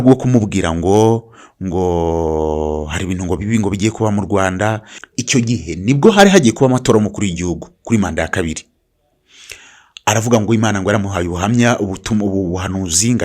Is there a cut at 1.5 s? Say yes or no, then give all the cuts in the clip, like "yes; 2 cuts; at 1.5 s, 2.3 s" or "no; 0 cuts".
no; 1 cut; at 4.9 s